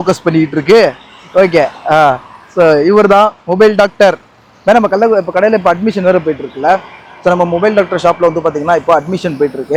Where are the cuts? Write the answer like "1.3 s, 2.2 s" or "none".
none

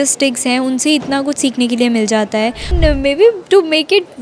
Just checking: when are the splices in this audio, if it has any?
2.7 s

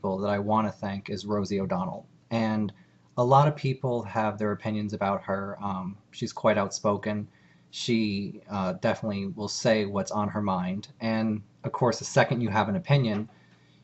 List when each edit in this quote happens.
8.3 s

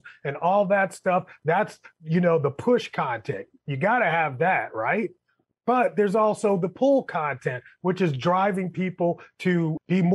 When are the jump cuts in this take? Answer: none

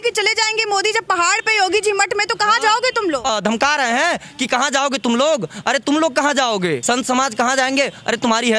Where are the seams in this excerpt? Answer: 3.3 s, 6.8 s

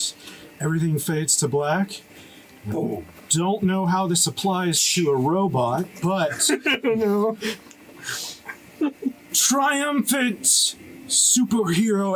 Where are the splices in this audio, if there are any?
none

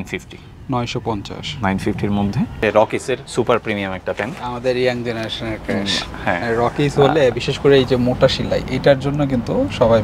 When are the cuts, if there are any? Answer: 2.6 s

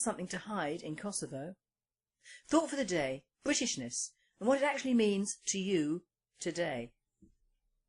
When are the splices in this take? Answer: 3.4 s

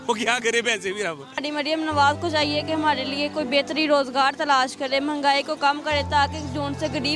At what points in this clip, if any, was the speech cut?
1.5 s

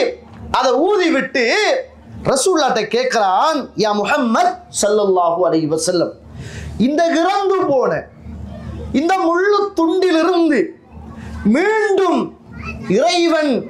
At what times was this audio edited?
none

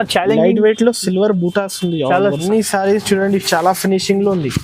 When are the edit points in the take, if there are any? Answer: 2.4 s

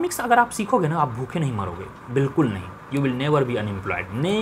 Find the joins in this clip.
none

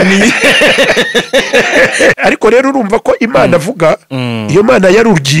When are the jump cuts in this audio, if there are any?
2.2 s

